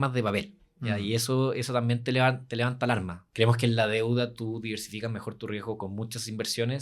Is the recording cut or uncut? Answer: cut